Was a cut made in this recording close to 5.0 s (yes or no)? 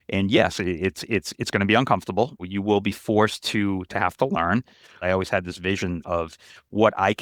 yes